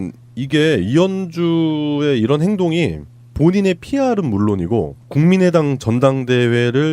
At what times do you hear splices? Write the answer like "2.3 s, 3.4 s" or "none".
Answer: 1.4 s